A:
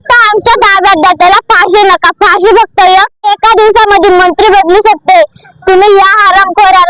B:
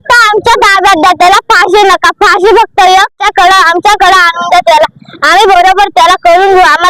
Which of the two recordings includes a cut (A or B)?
A